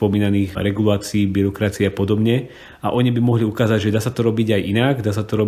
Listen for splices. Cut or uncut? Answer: uncut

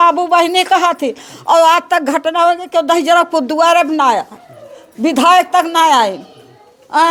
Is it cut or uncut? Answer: uncut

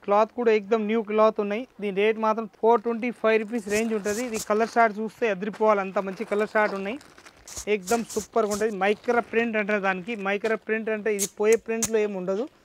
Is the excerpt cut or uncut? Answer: uncut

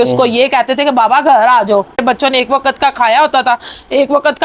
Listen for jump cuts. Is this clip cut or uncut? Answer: cut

